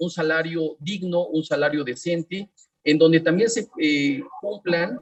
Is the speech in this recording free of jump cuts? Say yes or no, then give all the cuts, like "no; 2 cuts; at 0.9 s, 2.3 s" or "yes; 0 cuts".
yes; 0 cuts